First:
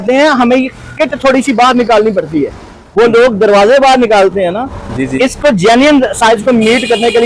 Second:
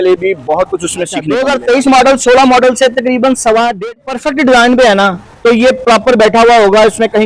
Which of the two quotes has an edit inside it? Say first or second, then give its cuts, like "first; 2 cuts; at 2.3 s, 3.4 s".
second; 2 cuts; at 1.3 s, 4.0 s